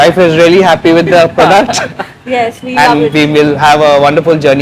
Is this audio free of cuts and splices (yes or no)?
yes